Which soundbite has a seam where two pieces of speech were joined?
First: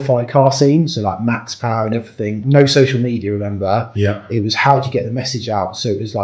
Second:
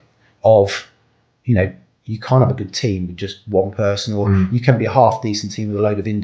first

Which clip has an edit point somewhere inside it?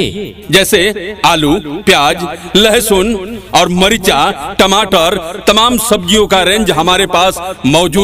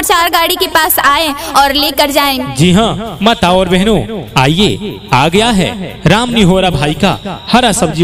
second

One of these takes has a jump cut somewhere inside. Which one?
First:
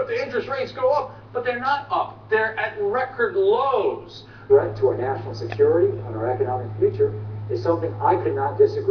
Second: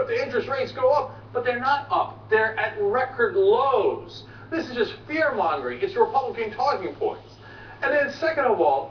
second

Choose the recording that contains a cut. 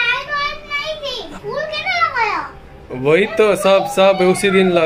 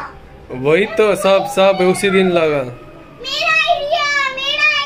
first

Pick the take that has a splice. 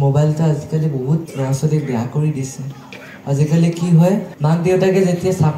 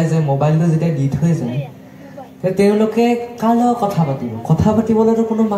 first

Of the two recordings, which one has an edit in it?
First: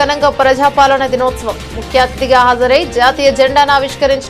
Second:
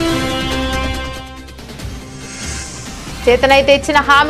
second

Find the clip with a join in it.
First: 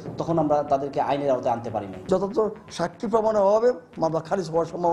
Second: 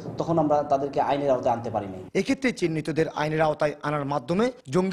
first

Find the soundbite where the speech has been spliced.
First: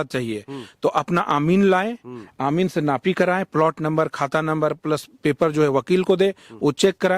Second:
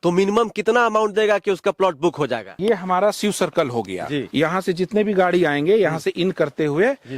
second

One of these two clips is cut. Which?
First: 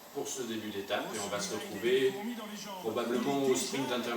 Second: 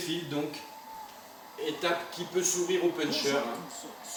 first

